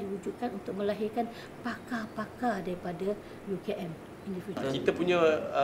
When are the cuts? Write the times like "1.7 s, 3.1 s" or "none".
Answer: 4.5 s